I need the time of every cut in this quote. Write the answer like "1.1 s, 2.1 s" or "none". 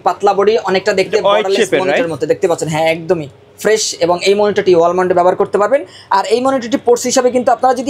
none